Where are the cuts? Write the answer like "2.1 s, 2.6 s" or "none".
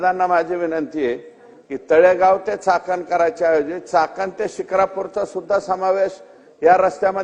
none